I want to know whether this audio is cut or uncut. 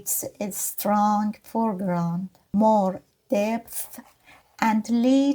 cut